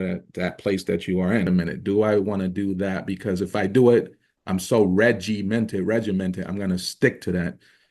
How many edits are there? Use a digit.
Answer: 1